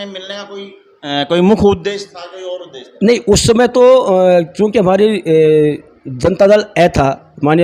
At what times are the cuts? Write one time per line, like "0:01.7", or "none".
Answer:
none